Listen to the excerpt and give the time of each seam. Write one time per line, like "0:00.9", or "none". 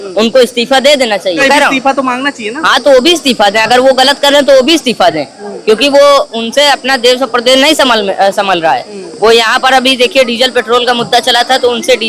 0:01.4